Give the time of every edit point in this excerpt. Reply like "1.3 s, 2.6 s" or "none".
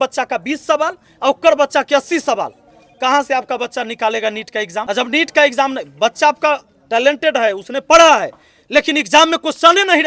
4.8 s